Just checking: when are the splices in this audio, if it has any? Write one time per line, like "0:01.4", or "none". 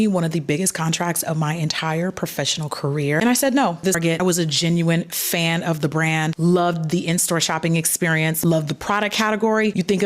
0:04.0